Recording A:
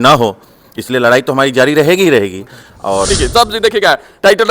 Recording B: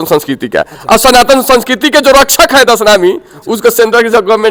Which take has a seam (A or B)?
A